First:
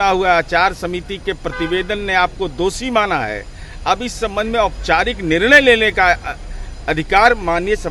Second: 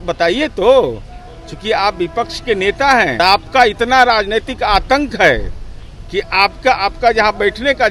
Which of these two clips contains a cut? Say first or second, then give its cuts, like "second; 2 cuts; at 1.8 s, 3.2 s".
second; 1 cut; at 3.2 s